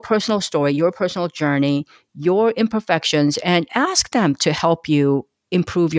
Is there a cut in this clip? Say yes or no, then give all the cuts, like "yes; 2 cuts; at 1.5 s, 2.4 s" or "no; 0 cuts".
no; 0 cuts